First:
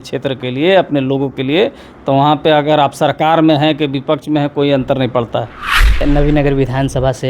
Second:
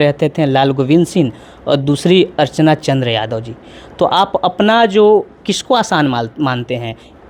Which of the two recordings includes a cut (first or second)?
first